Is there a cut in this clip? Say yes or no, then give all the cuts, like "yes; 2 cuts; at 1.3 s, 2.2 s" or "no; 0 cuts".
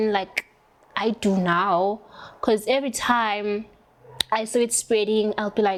no; 0 cuts